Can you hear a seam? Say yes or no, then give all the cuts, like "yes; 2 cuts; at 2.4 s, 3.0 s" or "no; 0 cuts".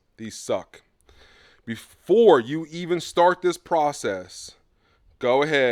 no; 0 cuts